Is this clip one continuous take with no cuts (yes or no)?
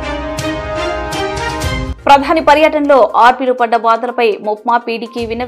no